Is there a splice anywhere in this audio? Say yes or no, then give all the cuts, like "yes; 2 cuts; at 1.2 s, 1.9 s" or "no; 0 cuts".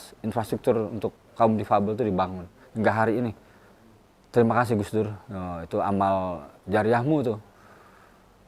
no; 0 cuts